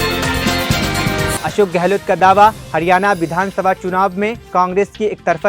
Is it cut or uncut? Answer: uncut